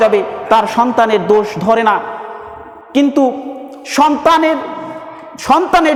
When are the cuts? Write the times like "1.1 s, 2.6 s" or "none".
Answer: none